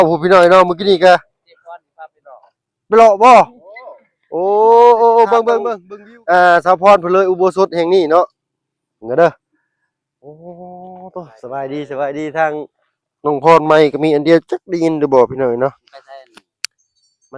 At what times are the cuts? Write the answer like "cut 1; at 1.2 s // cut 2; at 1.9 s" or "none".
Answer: cut 1; at 5.5 s

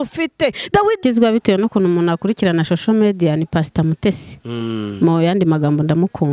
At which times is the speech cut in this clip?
cut 1; at 1.0 s

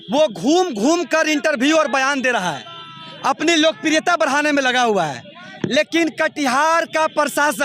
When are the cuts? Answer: none

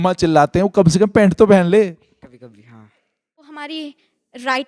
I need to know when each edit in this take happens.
cut 1; at 3.6 s

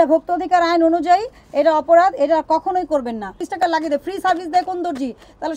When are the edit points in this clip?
cut 1; at 3.4 s

